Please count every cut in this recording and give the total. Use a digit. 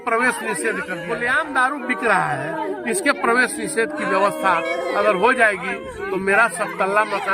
1